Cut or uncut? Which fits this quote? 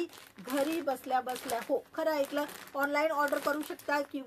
uncut